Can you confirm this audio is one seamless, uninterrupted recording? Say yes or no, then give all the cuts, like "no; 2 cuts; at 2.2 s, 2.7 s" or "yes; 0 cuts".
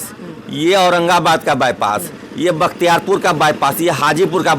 yes; 0 cuts